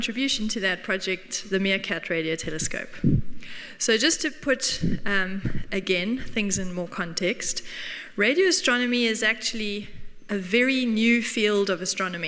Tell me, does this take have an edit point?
no; 0 cuts

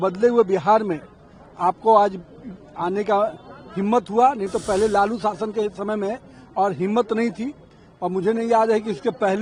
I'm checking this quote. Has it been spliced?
no; 0 cuts

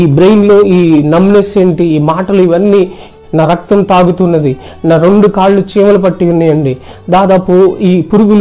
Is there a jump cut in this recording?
yes; 1 cut; at 3.0 s

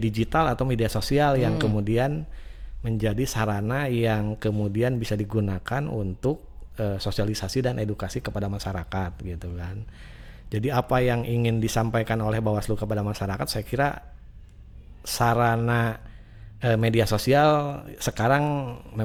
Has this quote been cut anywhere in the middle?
no; 0 cuts

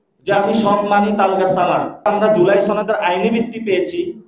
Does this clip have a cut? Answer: yes; 1 cut; at 2.1 s

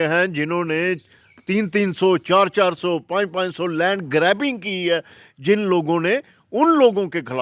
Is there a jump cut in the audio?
no; 0 cuts

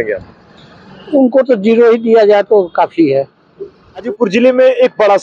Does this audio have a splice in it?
yes; 1 cut; at 4.1 s

